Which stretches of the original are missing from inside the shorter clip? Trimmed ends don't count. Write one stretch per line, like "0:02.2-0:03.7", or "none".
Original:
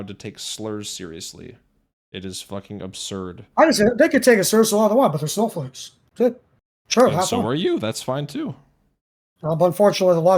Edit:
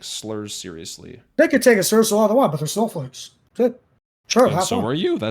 0:01.7-0:03.9